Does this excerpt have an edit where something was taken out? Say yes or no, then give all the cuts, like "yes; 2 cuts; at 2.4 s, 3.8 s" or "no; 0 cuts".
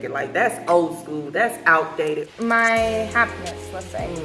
yes; 1 cut; at 2.3 s